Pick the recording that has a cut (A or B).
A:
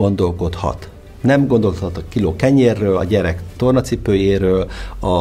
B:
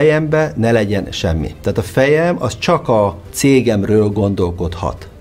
B